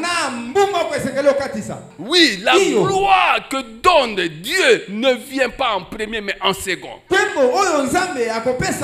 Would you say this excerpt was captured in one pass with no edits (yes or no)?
yes